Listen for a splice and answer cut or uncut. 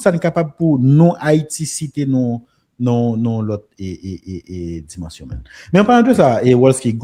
uncut